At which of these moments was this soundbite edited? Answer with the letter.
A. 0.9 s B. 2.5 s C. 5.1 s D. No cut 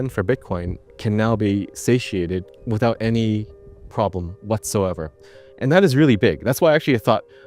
B